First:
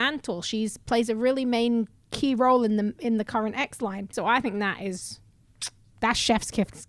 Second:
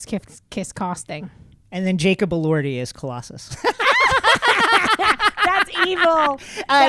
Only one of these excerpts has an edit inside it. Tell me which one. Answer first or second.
first